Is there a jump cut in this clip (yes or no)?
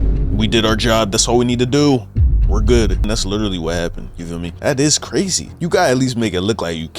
yes